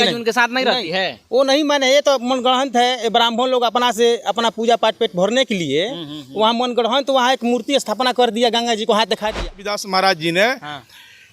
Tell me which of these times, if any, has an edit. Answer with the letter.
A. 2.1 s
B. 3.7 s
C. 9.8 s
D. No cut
C